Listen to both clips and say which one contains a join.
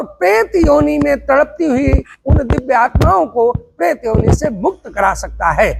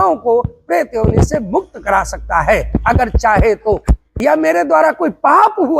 second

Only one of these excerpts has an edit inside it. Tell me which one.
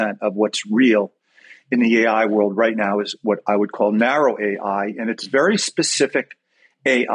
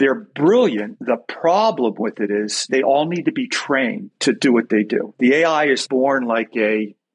second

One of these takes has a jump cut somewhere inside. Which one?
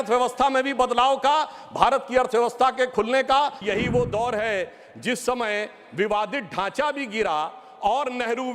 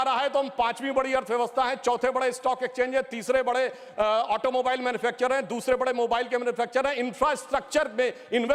first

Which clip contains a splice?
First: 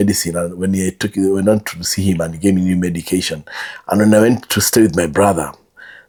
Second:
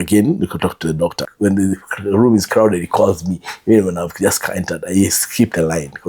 second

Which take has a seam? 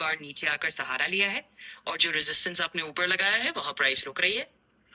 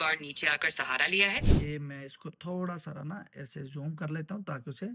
second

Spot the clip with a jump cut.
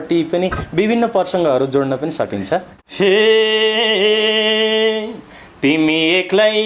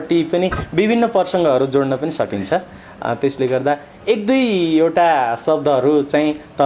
first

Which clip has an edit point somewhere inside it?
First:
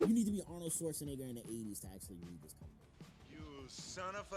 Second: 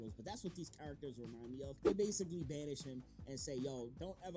second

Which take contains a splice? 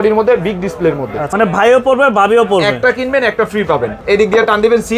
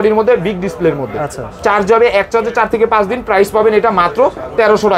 first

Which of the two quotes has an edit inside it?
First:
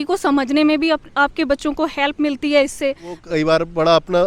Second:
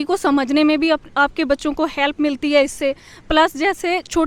first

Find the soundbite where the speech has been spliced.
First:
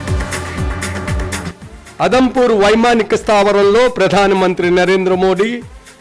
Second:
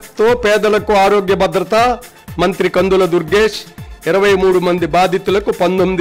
first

